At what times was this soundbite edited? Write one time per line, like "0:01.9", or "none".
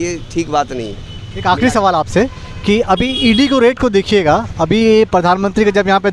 none